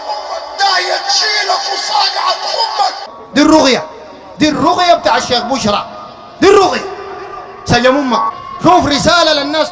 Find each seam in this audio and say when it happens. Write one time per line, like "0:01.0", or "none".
0:08.3